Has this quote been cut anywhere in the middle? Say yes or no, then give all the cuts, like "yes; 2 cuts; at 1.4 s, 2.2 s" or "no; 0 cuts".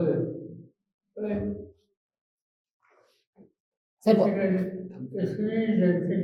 no; 0 cuts